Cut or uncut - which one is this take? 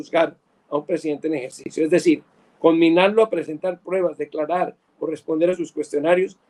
uncut